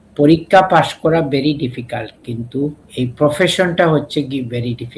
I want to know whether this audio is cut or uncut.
cut